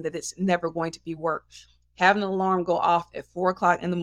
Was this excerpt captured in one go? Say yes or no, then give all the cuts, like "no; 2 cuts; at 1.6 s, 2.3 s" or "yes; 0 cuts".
yes; 0 cuts